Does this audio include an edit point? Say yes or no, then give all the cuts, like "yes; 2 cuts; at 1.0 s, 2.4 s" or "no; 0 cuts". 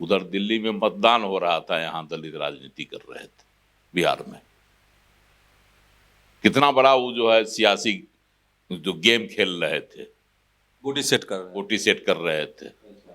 no; 0 cuts